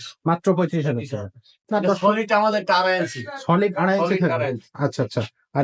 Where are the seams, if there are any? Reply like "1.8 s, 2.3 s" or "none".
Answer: 1.7 s